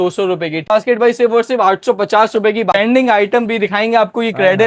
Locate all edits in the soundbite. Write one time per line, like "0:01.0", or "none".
0:00.7
0:02.7